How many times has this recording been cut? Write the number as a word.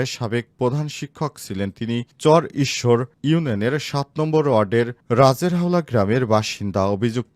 zero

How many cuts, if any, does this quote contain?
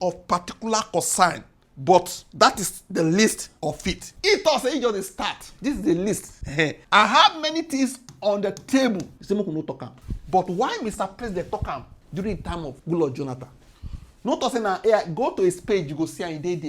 one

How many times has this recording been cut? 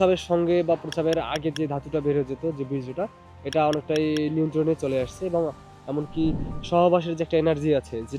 one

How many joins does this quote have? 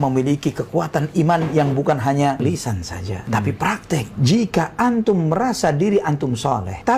two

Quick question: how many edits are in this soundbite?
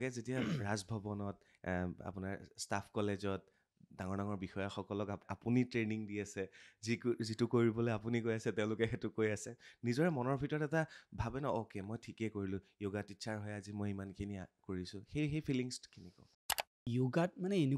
two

